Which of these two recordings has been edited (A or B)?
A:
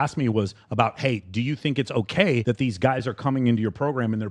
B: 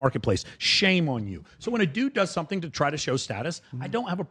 A